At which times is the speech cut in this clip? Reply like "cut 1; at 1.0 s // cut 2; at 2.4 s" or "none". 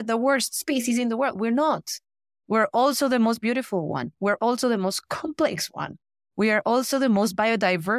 none